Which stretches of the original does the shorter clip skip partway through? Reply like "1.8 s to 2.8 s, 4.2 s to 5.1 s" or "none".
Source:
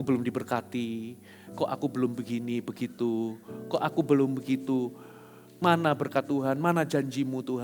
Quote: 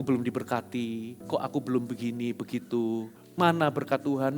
1.1 s to 1.4 s, 3.5 s to 5.4 s